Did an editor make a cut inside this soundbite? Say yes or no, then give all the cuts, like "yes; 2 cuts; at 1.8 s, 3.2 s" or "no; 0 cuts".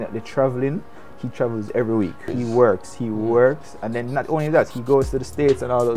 yes; 1 cut; at 2.3 s